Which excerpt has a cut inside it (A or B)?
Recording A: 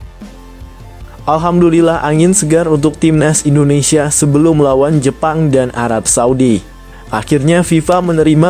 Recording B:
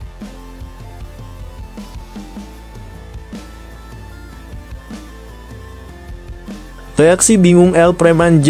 A